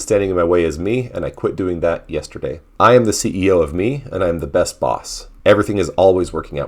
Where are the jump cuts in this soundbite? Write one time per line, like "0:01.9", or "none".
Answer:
0:02.6
0:05.2